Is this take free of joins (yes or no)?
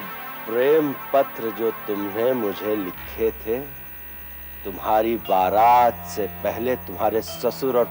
yes